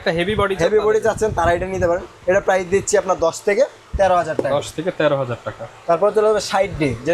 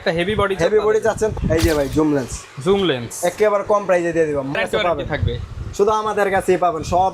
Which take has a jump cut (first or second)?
second